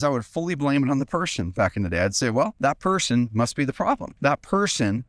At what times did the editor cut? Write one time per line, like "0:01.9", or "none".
0:02.5
0:04.1